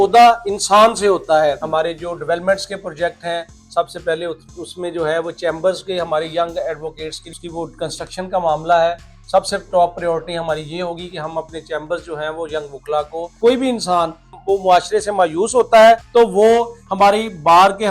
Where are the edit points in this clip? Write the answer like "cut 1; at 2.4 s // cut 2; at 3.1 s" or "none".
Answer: cut 1; at 1.6 s // cut 2; at 7.4 s // cut 3; at 13.4 s // cut 4; at 14.3 s // cut 5; at 16.1 s